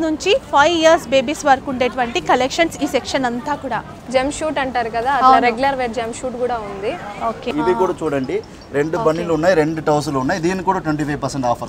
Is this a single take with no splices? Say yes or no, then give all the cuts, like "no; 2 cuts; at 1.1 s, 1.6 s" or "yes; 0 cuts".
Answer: no; 2 cuts; at 4.0 s, 7.4 s